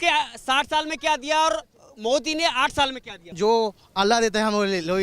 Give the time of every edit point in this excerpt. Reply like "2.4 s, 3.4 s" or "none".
3.3 s